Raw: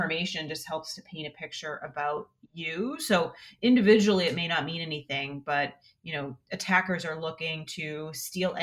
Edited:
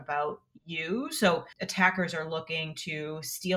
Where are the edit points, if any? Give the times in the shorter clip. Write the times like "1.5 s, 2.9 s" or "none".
1.6 s